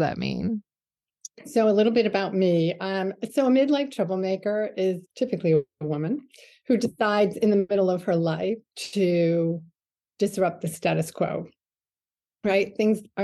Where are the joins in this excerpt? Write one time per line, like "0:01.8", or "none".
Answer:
0:05.1